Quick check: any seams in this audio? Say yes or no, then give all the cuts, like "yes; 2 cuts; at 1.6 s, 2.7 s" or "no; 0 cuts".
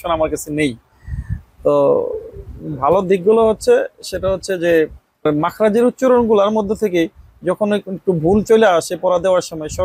yes; 1 cut; at 5.3 s